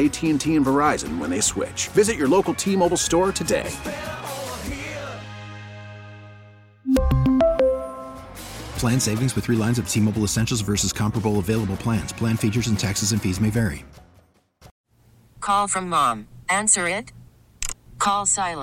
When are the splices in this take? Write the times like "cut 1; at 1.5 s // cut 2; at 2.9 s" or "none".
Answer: cut 1; at 14.8 s